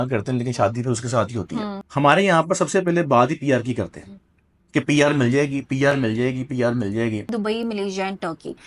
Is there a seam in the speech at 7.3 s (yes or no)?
yes